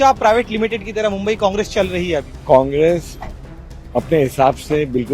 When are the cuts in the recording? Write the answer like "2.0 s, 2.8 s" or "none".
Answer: 2.3 s

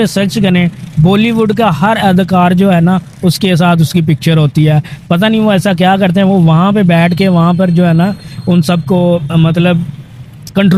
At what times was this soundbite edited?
none

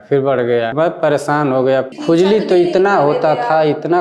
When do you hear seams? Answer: 0.7 s, 1.9 s

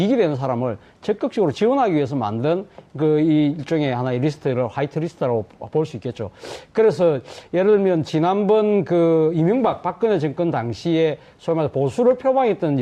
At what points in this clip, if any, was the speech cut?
10.5 s

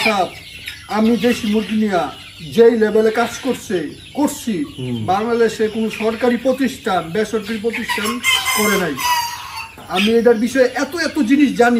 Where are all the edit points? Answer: none

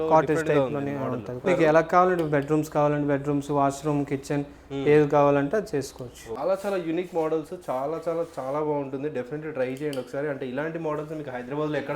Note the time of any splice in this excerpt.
1.4 s, 6.3 s

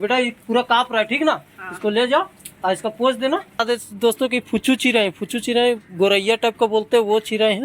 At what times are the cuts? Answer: 3.6 s

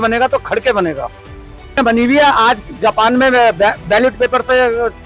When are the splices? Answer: none

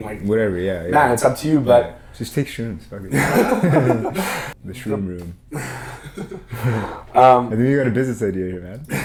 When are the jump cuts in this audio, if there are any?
none

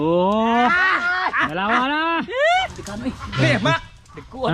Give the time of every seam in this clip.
2.8 s

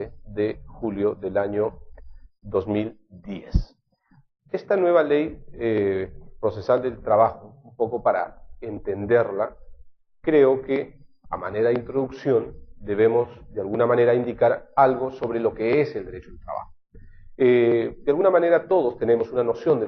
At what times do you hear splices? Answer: 15.5 s

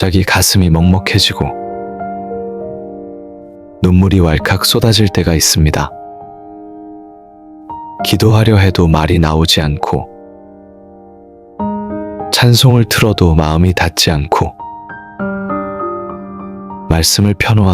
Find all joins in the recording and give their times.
10.5 s, 12.3 s

